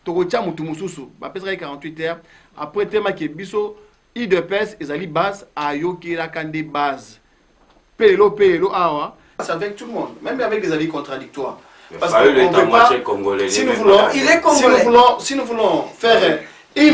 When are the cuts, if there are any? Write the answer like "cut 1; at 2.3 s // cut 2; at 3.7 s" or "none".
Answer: cut 1; at 9.4 s